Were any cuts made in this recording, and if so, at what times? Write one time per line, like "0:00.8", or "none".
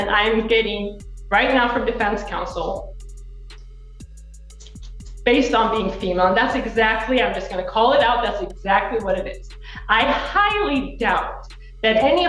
0:03.4
0:05.1